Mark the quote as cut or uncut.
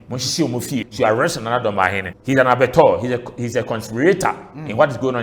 cut